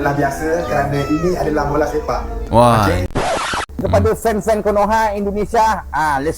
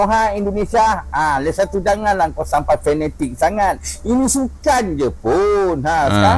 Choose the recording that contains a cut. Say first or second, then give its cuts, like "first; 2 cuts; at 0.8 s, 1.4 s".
first; 1 cut; at 3.0 s